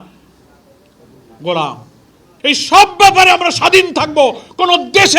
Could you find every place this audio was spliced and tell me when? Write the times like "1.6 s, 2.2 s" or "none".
2.3 s